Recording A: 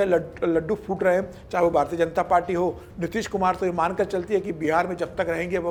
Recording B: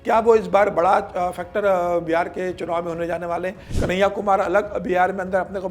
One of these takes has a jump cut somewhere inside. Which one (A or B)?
B